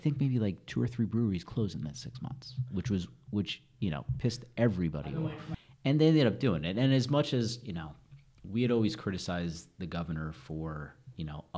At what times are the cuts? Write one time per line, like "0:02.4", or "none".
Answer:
0:05.3